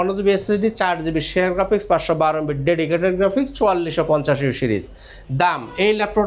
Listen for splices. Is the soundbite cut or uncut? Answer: uncut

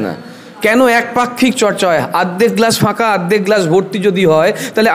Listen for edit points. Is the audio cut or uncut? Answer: uncut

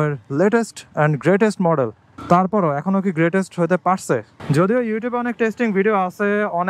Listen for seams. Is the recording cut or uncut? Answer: cut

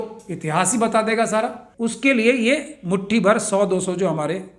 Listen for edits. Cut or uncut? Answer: cut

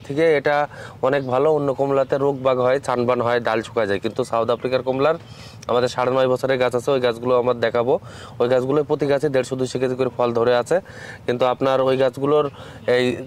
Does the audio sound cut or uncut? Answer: uncut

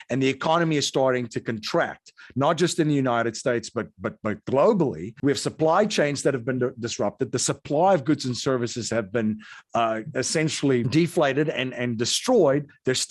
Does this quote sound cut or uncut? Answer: cut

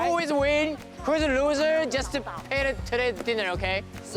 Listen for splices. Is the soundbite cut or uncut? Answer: uncut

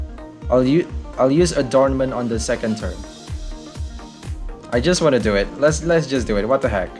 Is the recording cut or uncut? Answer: cut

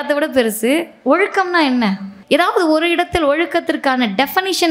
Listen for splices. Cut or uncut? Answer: cut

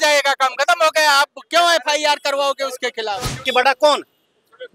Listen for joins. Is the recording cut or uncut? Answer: cut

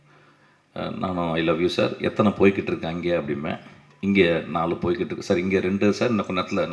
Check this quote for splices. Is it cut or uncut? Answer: uncut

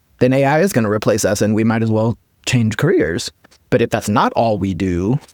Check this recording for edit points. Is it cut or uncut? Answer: uncut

